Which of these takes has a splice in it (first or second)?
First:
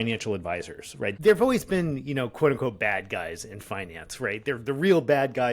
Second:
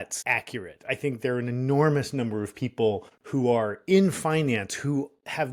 first